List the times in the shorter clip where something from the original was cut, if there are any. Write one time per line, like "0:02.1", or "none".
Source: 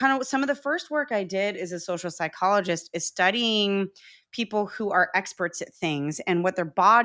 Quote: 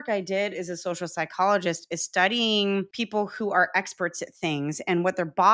0:03.0